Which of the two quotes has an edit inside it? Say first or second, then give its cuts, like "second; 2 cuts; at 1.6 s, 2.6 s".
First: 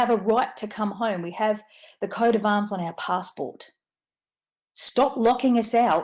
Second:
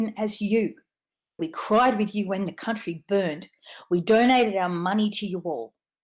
second; 1 cut; at 1.4 s